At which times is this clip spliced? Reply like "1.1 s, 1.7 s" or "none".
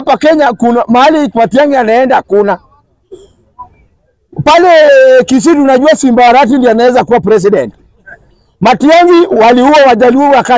none